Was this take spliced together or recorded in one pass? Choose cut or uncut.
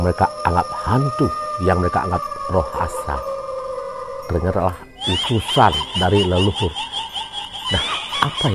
cut